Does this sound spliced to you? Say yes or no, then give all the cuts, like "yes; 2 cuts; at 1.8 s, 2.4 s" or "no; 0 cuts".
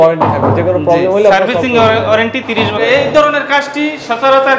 yes; 1 cut; at 2.8 s